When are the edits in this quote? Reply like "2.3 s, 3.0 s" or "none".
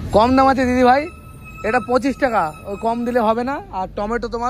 none

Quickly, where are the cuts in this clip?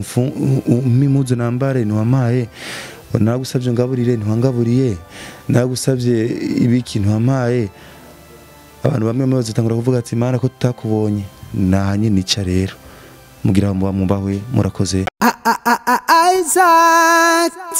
15.1 s

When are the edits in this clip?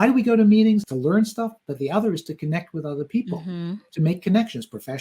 0.9 s

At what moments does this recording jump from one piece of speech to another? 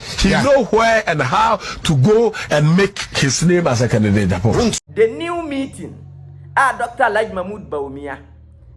4.8 s

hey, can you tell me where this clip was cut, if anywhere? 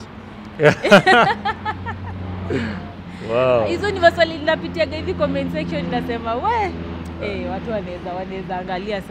none

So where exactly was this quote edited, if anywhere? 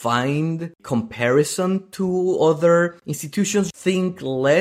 3.7 s

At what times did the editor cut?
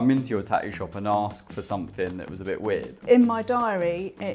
2.9 s

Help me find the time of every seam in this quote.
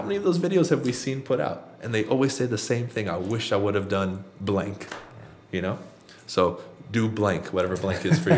none

